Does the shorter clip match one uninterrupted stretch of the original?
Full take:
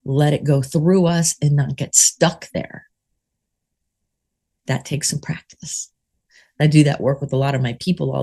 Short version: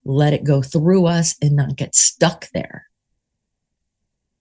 yes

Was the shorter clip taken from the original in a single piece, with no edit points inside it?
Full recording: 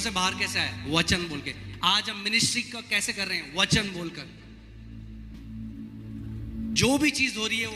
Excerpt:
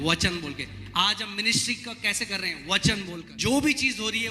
no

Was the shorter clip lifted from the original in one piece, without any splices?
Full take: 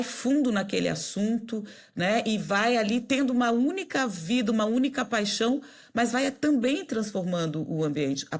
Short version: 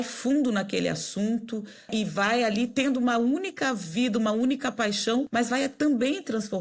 no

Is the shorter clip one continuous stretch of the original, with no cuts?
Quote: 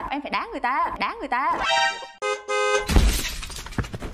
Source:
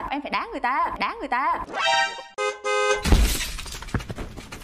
no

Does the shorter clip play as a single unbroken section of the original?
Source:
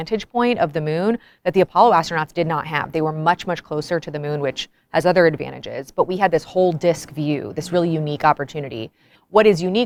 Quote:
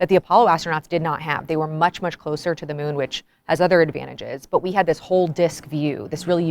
yes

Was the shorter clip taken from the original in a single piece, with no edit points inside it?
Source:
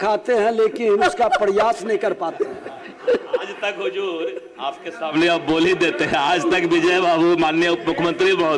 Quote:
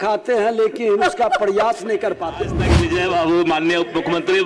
no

